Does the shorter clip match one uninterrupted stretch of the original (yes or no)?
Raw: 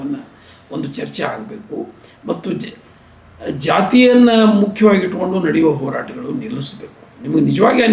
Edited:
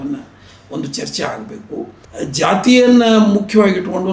no